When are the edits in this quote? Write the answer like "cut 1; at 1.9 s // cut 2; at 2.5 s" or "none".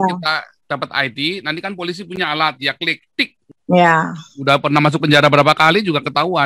cut 1; at 3.4 s